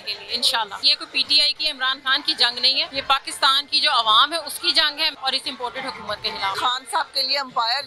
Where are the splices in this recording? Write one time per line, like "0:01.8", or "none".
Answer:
0:01.0
0:02.9
0:05.2
0:06.6